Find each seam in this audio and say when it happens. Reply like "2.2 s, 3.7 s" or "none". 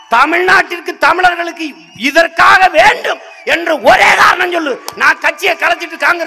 none